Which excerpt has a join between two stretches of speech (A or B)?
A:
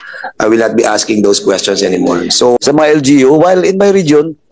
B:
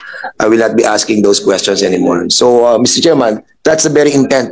A